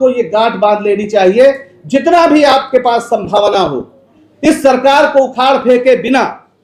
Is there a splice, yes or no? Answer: no